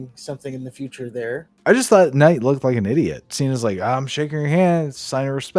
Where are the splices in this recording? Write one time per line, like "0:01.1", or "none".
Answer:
0:01.5
0:03.2